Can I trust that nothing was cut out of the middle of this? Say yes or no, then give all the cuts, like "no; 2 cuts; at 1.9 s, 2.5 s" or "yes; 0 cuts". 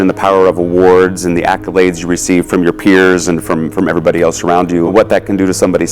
no; 1 cut; at 4.9 s